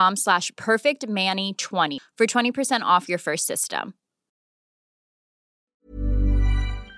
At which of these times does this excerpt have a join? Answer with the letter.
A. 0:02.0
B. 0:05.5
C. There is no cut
A